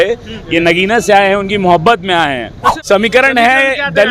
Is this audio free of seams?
no; 1 cut; at 2.6 s

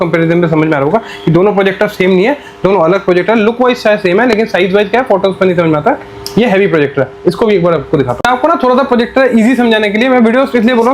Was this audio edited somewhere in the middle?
no; 0 cuts

